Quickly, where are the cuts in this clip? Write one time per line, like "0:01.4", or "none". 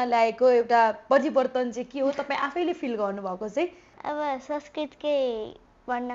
0:03.9